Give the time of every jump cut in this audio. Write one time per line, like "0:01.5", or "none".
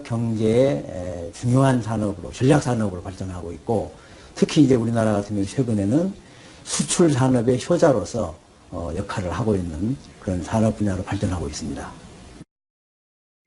0:04.9